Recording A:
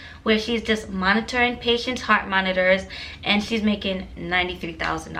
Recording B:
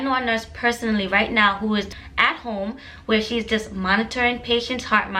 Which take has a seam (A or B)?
B